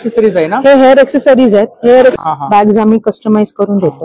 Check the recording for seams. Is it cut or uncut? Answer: cut